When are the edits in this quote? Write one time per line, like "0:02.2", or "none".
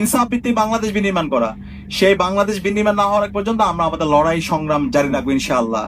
0:04.8